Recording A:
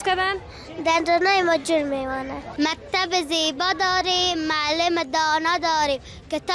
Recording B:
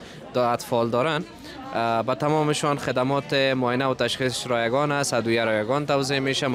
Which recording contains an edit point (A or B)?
A